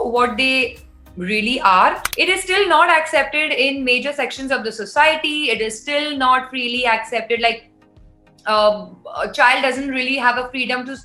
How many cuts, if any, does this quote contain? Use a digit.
1